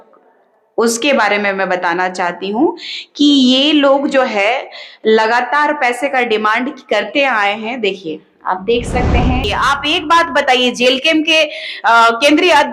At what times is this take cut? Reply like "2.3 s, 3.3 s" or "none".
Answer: 9.4 s

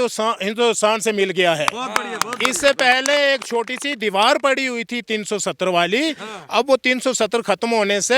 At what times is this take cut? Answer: none

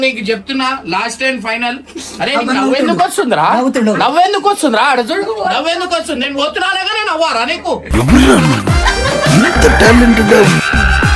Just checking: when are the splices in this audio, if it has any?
none

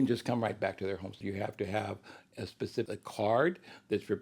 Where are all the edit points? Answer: 1.2 s, 2.9 s

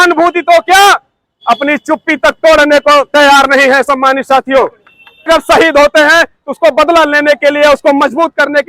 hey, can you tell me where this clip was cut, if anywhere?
5.3 s

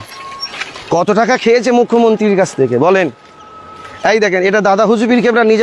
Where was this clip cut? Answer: none

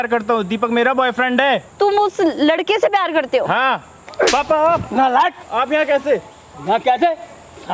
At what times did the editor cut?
1.7 s, 4.0 s, 5.4 s

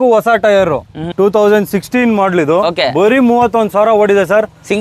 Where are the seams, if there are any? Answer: 1.0 s

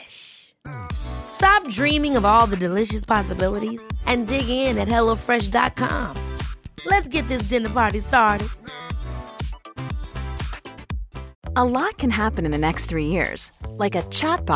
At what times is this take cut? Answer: 11.3 s

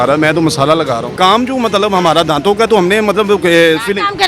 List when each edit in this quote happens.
1.1 s

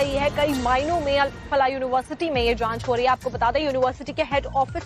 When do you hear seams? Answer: none

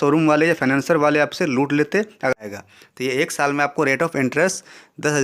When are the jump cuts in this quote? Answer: 2.4 s

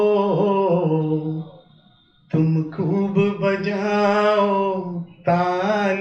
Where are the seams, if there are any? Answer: none

